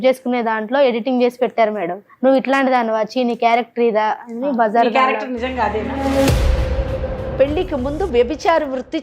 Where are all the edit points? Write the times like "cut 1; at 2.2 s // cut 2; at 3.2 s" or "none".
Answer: cut 1; at 7.3 s

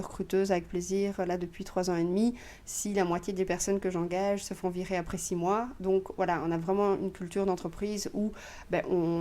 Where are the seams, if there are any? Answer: none

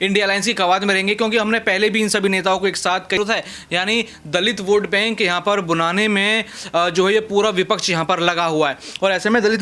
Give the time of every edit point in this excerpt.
cut 1; at 3.2 s

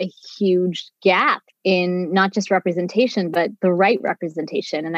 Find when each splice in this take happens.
cut 1; at 1.5 s

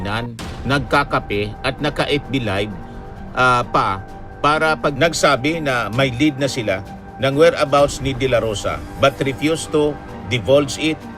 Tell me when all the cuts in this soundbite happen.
cut 1; at 4.9 s

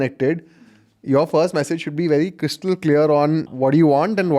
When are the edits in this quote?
cut 1; at 3.5 s

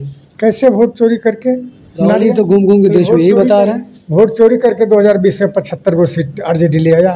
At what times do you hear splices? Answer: none

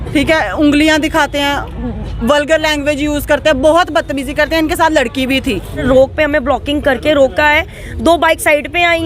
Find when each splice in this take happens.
cut 1; at 5.8 s

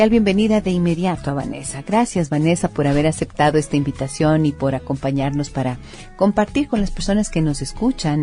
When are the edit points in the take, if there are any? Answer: none

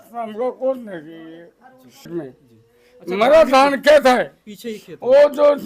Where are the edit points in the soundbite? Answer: cut 1; at 2.1 s

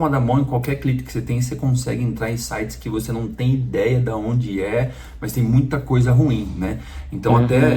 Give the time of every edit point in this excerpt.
none

